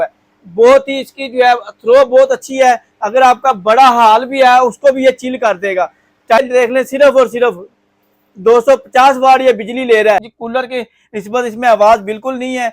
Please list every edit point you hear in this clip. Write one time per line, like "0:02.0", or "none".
0:06.4
0:10.2